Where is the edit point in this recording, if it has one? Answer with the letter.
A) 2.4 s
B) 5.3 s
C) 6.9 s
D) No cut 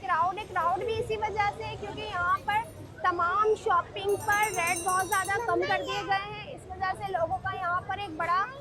D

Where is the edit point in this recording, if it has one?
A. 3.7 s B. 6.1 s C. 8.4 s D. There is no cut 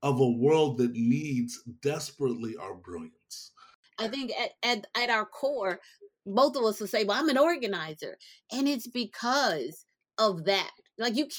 A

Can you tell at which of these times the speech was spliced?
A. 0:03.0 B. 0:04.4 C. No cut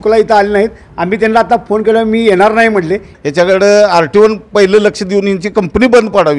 A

